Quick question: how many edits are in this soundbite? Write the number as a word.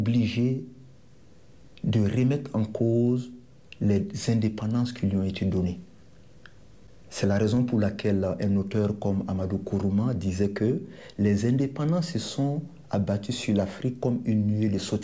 zero